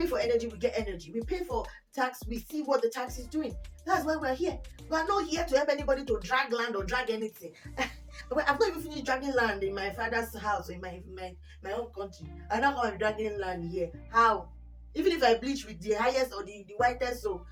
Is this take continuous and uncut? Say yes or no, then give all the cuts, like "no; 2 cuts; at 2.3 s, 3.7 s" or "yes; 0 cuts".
yes; 0 cuts